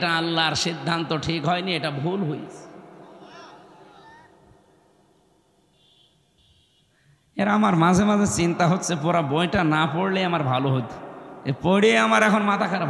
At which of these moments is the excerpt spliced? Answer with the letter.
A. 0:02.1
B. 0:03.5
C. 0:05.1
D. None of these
D